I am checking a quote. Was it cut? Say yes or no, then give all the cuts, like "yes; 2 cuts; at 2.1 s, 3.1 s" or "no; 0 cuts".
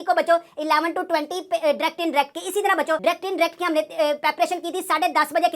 no; 0 cuts